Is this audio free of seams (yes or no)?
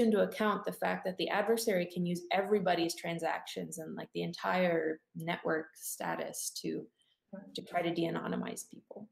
yes